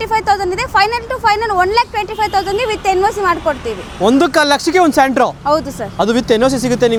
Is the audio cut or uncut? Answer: uncut